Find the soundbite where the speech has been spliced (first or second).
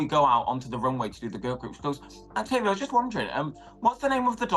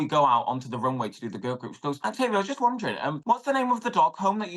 second